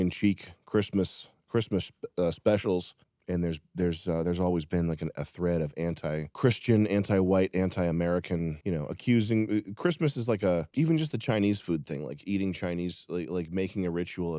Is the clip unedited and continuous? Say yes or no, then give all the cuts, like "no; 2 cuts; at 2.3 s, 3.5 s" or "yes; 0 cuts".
yes; 0 cuts